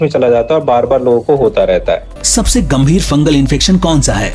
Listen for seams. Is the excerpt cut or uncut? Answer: cut